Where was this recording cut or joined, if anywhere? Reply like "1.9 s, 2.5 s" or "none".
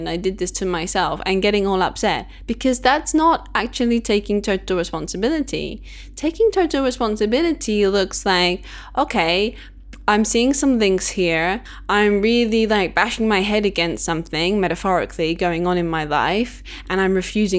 11.7 s